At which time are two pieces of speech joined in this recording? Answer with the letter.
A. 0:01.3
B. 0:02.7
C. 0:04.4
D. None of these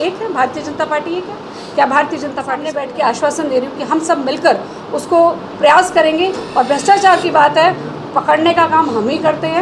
B